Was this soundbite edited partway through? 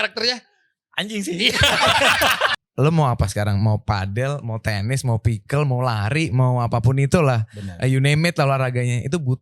yes; 1 cut; at 2.6 s

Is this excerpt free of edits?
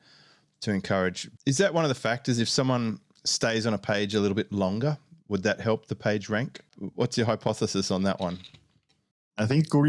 no; 1 cut; at 6.8 s

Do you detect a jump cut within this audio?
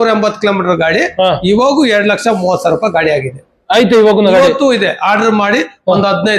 no; 0 cuts

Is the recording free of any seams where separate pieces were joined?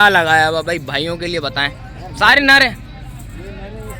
yes; 0 cuts

